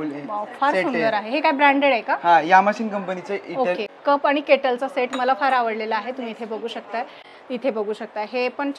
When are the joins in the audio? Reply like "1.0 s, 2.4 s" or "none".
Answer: 3.9 s, 7.2 s